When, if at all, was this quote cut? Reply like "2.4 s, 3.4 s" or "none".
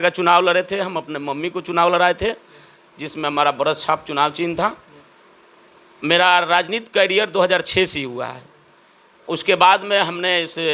none